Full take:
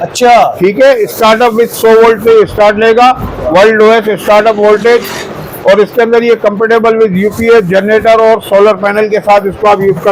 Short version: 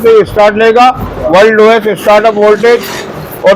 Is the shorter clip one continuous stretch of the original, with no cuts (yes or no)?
yes